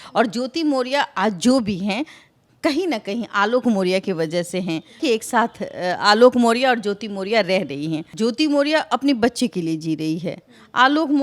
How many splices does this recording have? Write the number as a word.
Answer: two